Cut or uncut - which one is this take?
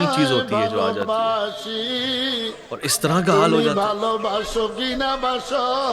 uncut